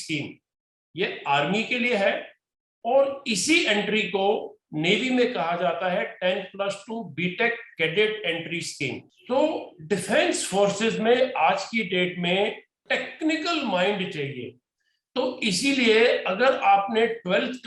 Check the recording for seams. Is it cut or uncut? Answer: cut